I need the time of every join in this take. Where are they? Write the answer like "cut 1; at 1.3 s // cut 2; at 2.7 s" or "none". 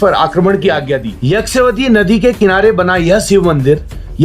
cut 1; at 1.1 s